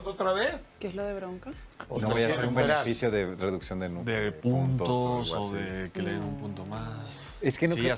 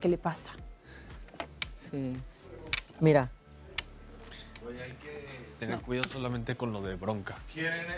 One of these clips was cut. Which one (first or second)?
second